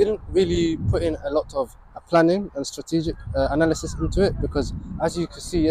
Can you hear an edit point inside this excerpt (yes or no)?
no